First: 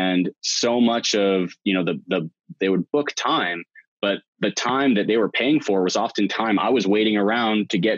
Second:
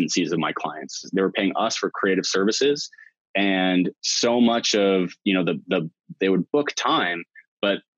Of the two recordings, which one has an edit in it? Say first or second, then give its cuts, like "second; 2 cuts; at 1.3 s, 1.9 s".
second; 1 cut; at 1.1 s